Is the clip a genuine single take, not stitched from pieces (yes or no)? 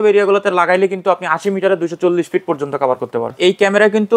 no